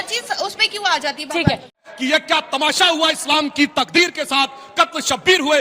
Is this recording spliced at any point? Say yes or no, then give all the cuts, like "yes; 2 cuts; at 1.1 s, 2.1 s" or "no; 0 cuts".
yes; 1 cut; at 1.8 s